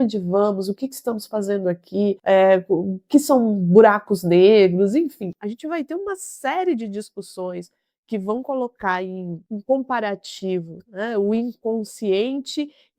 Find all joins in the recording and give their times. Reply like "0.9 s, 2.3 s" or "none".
2.2 s

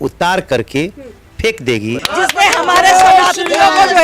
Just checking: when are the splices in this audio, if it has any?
2.0 s

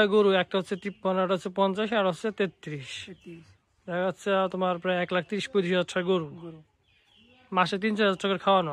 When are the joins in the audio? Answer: none

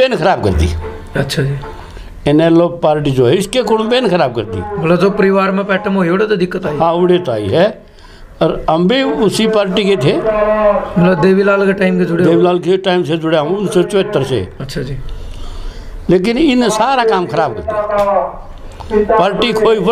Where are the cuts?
none

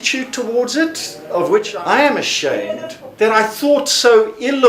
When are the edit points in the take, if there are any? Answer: 1.7 s

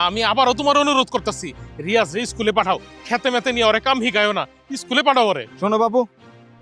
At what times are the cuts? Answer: none

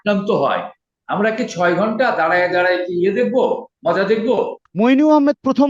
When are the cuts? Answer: 4.6 s

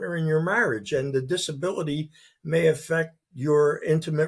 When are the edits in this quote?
none

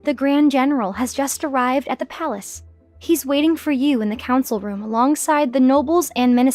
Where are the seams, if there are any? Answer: none

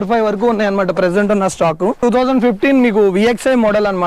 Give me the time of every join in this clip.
2.0 s

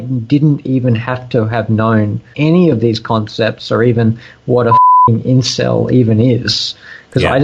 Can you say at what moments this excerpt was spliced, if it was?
2.3 s

